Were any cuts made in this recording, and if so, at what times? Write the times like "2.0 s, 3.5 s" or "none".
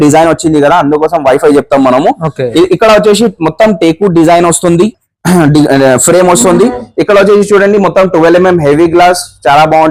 none